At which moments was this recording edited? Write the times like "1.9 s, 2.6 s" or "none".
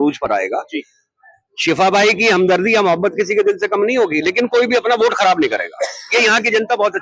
none